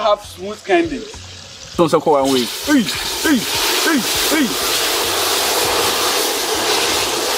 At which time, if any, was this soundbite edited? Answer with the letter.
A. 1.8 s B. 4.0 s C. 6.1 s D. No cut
A